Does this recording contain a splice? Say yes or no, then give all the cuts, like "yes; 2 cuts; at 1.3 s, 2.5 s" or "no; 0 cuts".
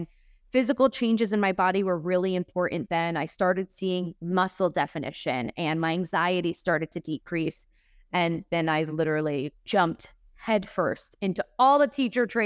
yes; 1 cut; at 9.6 s